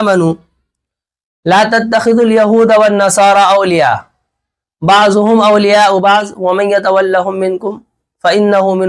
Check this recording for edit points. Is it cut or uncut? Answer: uncut